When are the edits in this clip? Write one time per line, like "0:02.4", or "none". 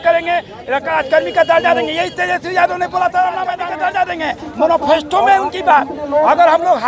0:03.6